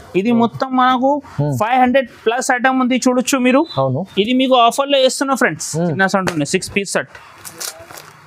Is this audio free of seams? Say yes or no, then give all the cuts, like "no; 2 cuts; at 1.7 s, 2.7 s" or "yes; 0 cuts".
no; 1 cut; at 5.9 s